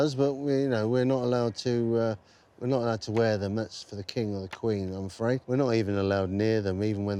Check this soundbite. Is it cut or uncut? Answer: uncut